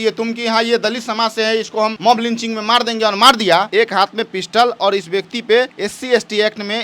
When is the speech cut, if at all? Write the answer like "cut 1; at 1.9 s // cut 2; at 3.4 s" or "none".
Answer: cut 1; at 2.0 s // cut 2; at 3.7 s // cut 3; at 5.8 s